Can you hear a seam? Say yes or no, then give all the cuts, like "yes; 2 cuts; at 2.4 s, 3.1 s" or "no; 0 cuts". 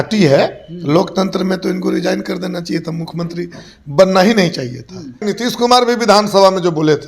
yes; 1 cut; at 5.2 s